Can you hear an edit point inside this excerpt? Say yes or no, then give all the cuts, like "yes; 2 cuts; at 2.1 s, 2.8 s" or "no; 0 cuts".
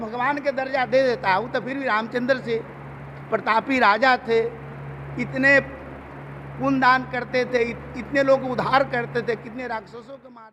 no; 0 cuts